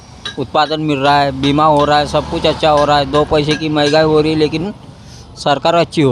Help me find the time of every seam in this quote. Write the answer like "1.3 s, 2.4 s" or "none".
none